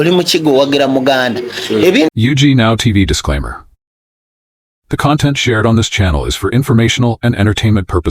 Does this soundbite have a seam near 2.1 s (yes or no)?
yes